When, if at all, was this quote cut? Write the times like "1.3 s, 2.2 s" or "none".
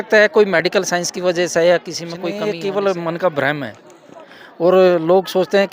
2.4 s